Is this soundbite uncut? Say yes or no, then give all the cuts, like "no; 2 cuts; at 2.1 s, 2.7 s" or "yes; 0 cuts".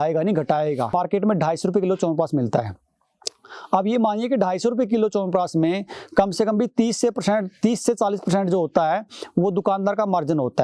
no; 1 cut; at 0.9 s